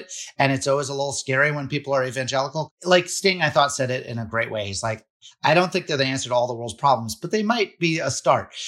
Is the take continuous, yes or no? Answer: no